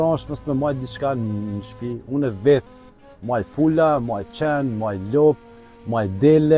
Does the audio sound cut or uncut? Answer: uncut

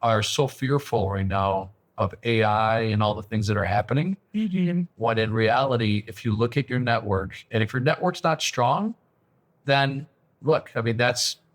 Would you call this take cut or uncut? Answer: uncut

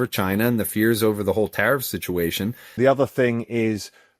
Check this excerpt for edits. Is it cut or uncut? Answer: cut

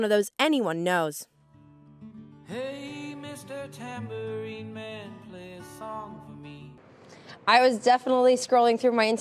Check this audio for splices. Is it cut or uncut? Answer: cut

